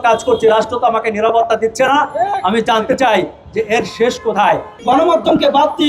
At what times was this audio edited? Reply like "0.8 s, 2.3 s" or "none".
4.7 s